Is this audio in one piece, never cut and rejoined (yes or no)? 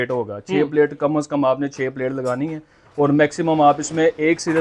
yes